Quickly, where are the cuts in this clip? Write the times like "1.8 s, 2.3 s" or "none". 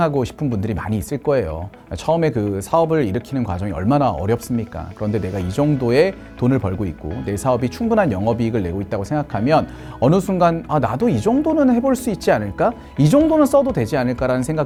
none